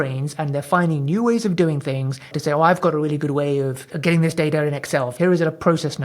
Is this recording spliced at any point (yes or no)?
yes